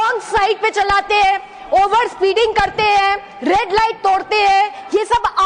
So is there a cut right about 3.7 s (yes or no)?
no